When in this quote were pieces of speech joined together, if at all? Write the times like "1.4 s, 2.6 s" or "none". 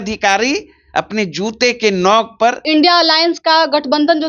2.6 s

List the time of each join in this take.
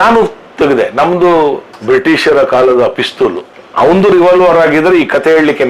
1.7 s, 3.5 s

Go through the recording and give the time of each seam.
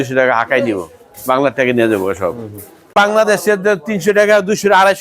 3.1 s

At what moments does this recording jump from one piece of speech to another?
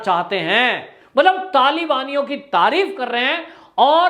0.9 s

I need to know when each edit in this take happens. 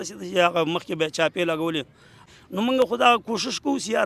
2.2 s

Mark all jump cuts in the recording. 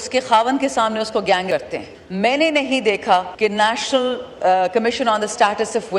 1.5 s, 3.3 s

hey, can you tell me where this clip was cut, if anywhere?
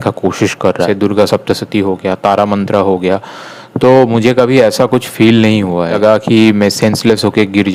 0.8 s, 5.9 s

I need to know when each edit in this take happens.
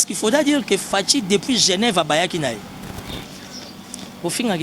3.1 s

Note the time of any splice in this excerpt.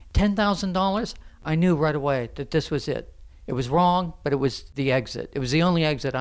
1.4 s, 4.7 s

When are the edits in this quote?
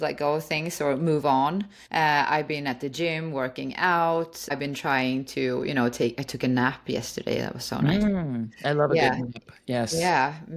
1.8 s, 4.5 s

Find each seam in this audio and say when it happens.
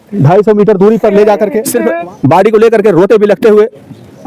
1.6 s

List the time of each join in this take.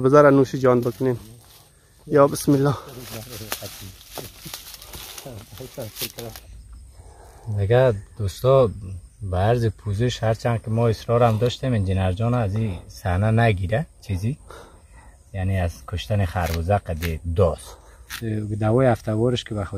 6.2 s, 18.2 s

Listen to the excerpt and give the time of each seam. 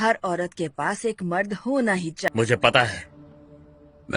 2.3 s

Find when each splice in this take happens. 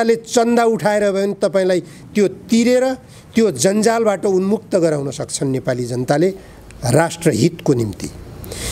none

